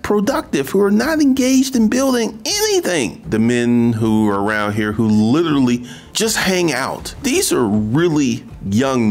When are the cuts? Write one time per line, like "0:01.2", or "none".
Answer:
0:03.2
0:07.0